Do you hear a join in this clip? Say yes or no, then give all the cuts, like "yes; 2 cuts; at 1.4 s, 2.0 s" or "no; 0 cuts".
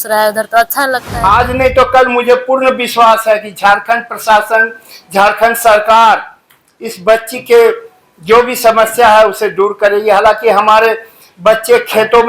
yes; 1 cut; at 1.1 s